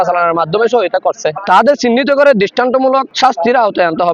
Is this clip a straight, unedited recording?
no; 2 cuts; at 1.4 s, 3.1 s

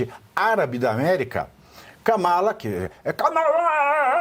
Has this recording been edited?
no; 0 cuts

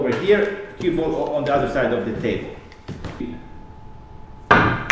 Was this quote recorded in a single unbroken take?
no; 1 cut; at 3.2 s

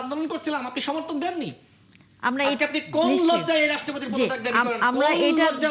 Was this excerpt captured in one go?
yes; 0 cuts

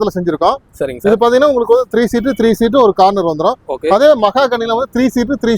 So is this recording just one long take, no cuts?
yes; 0 cuts

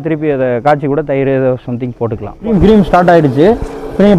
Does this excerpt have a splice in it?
yes; 1 cut; at 2.5 s

